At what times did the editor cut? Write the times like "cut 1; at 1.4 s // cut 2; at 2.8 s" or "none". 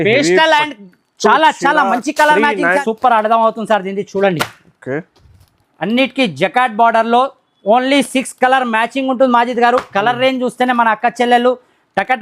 cut 1; at 2.8 s

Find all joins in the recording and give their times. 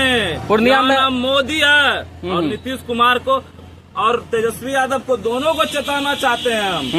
none

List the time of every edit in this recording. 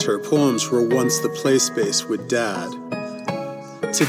cut 1; at 3.2 s

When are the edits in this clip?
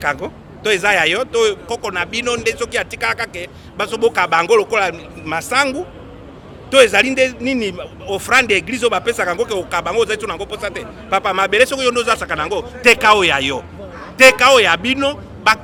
none

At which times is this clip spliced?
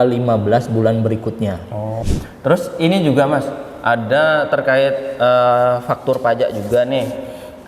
cut 1; at 2.0 s

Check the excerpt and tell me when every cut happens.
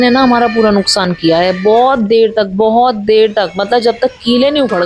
none

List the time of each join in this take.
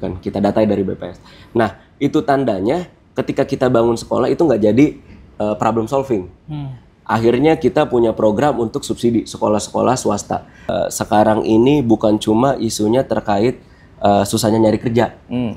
cut 1; at 10.7 s

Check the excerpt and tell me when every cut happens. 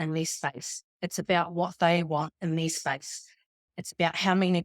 cut 1; at 3.6 s

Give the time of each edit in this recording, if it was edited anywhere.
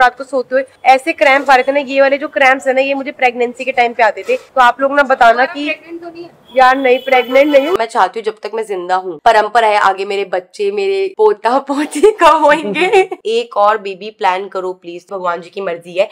cut 1; at 7.8 s // cut 2; at 9.2 s // cut 3; at 13.2 s // cut 4; at 15.0 s

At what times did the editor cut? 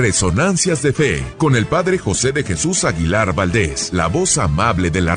cut 1; at 1.2 s // cut 2; at 3.8 s

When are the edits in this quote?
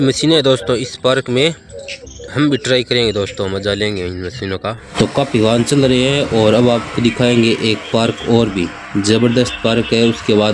cut 1; at 4.8 s

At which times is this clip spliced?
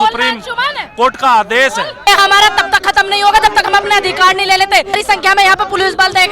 cut 1; at 2.1 s // cut 2; at 4.9 s

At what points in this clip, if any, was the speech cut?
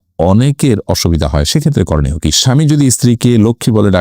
cut 1; at 2.4 s

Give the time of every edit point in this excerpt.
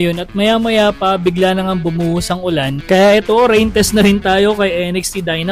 cut 1; at 2.8 s

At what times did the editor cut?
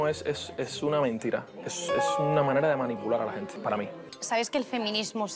cut 1; at 4.2 s

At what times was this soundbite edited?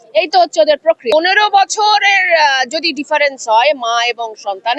cut 1; at 1.1 s

